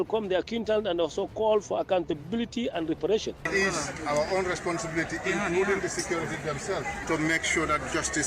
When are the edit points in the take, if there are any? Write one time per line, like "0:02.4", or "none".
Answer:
0:03.4